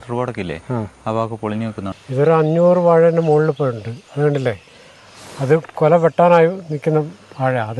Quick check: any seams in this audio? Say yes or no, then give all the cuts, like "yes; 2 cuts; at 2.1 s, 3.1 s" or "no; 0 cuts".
yes; 1 cut; at 1.9 s